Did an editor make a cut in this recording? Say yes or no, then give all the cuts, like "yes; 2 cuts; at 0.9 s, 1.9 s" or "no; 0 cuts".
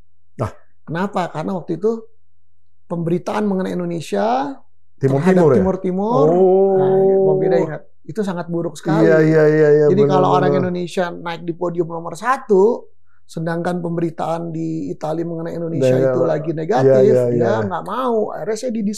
no; 0 cuts